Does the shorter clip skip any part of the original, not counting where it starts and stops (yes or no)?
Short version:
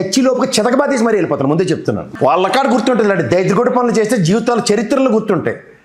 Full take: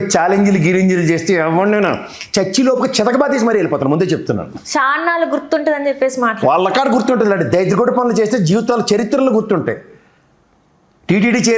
yes